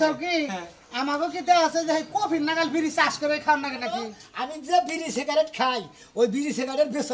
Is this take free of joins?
no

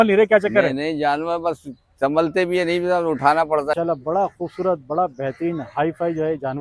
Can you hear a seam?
yes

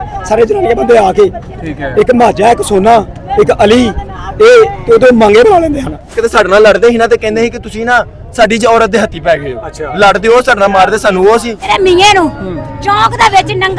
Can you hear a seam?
yes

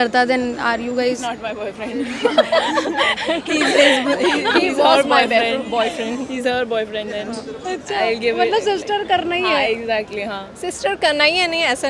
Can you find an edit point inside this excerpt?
no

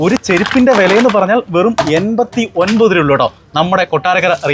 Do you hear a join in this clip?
no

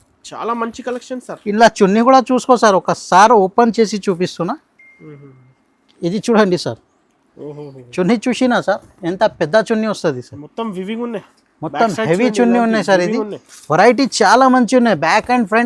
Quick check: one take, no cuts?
yes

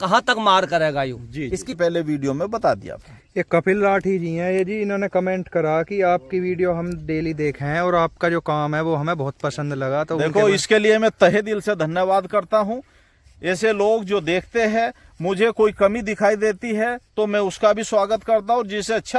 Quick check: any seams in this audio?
yes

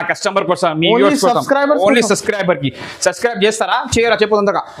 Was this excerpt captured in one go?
yes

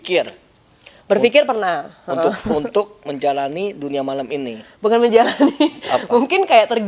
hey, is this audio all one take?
yes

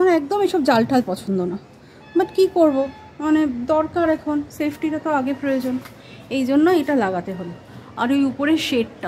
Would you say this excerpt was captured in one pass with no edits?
yes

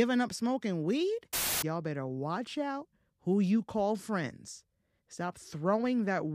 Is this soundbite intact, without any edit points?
no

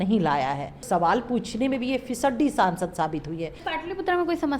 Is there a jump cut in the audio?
yes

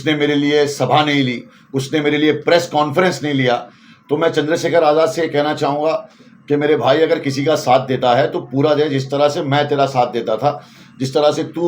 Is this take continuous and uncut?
yes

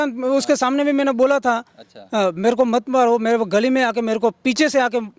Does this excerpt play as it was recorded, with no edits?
yes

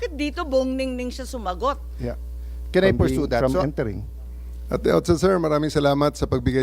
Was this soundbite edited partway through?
yes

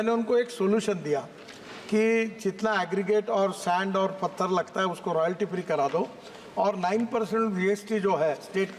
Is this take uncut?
yes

